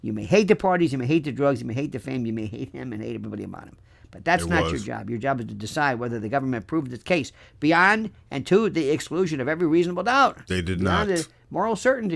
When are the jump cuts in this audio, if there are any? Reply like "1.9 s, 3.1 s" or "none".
none